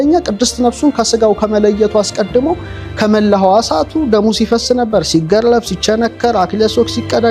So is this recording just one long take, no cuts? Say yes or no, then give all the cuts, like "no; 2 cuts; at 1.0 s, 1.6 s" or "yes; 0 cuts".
yes; 0 cuts